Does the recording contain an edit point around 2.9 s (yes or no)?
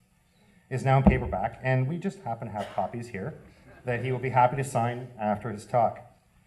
no